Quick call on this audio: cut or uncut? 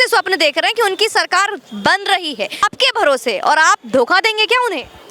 cut